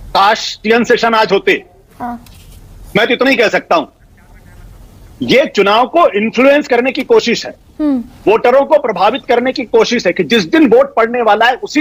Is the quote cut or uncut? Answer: uncut